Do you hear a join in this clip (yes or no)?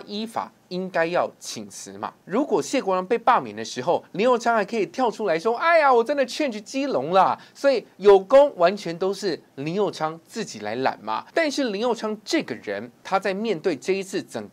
yes